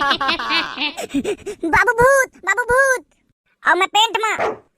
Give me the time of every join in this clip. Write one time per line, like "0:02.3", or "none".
0:01.0